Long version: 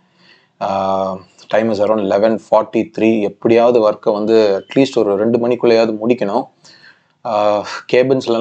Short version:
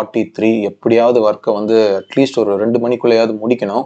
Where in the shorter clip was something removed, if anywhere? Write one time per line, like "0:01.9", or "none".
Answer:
none